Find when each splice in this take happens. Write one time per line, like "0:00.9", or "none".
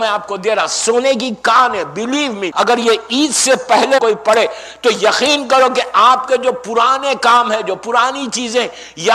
0:02.4
0:04.0